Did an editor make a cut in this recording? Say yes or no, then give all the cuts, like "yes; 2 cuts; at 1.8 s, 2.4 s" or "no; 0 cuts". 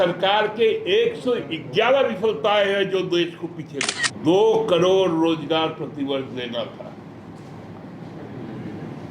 yes; 1 cut; at 4.0 s